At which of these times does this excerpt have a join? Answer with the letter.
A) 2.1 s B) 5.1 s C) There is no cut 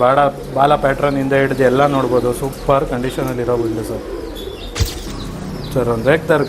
B